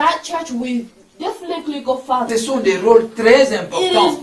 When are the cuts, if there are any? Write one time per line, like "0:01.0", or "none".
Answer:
0:02.3